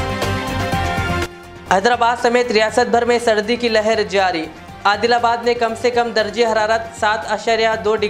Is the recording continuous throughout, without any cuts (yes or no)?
no